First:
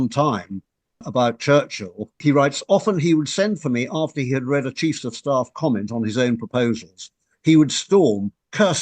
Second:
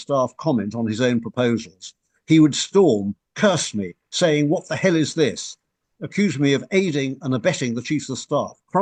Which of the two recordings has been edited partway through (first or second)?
first